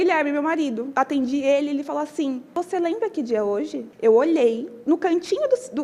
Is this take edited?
yes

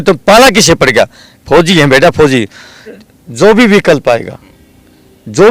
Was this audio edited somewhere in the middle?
yes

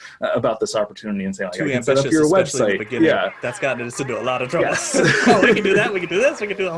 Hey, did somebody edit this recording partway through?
no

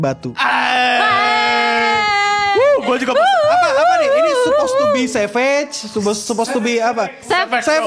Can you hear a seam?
no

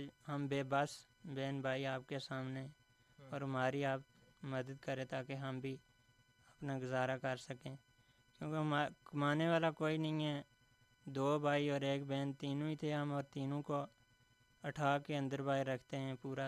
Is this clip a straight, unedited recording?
yes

